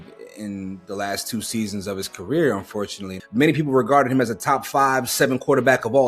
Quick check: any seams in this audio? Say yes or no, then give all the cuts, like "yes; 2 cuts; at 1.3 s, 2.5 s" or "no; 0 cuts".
yes; 1 cut; at 3.1 s